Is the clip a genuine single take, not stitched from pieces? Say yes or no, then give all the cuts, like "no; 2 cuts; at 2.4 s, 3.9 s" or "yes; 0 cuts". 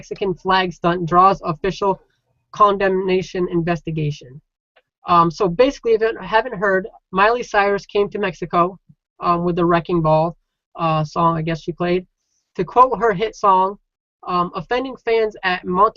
yes; 0 cuts